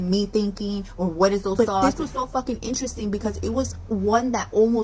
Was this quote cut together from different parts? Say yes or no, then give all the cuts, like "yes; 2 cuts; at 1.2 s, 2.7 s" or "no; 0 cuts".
yes; 1 cut; at 1.5 s